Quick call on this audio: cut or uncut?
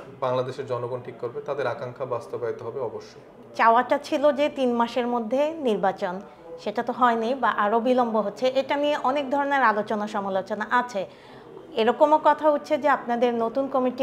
uncut